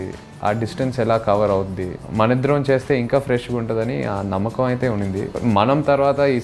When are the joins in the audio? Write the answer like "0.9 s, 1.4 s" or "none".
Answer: 2.0 s, 5.3 s